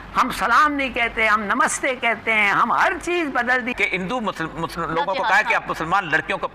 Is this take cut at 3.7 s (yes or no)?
yes